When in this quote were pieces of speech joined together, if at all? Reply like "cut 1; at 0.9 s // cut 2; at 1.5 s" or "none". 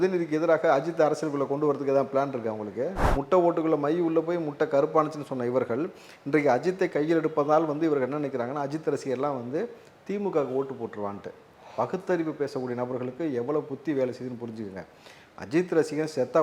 cut 1; at 3.0 s

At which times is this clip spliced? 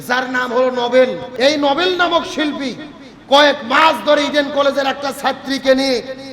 cut 1; at 1.2 s

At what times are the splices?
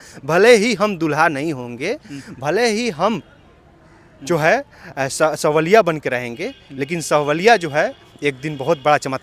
none

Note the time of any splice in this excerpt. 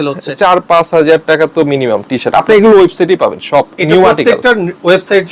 none

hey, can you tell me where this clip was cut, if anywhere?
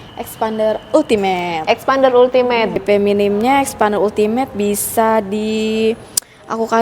cut 1; at 2.8 s

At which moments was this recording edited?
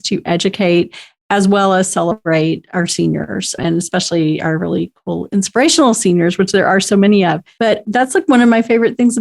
cut 1; at 3.6 s // cut 2; at 7.8 s

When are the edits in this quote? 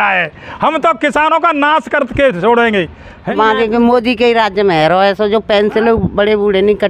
cut 1; at 3.3 s

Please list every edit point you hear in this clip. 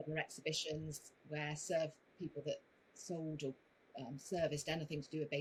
none

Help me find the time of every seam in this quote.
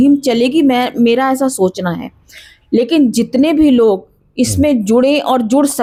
none

